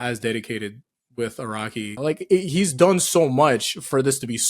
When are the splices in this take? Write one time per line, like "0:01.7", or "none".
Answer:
0:01.9